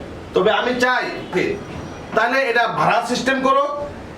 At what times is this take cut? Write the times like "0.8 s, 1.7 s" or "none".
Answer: 1.3 s